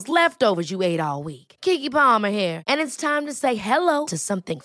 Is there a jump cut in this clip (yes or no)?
no